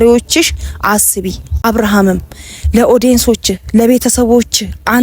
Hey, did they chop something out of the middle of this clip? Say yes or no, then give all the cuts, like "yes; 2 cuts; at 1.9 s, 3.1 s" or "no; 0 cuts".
yes; 1 cut; at 1.6 s